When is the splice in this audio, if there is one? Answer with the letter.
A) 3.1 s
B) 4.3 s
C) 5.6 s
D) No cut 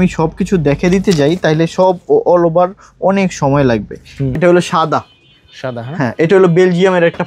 B